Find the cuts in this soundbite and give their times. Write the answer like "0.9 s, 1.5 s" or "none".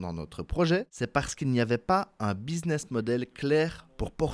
0.9 s